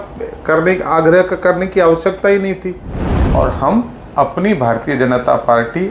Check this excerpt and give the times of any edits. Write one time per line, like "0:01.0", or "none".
0:03.1